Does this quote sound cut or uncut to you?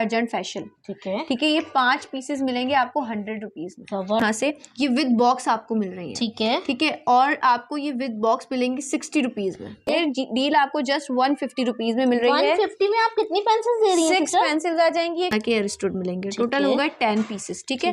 cut